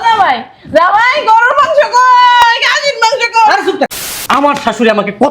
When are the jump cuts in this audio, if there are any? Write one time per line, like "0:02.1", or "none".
0:04.0